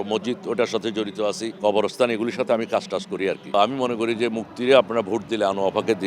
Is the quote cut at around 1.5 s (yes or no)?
yes